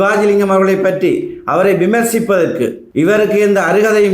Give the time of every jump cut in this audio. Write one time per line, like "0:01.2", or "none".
0:02.8